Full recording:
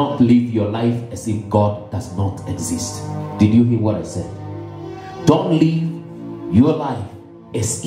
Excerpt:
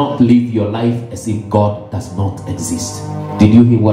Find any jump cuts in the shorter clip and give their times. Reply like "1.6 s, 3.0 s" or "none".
none